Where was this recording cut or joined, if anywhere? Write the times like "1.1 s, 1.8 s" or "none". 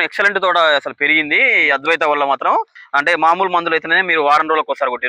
2.8 s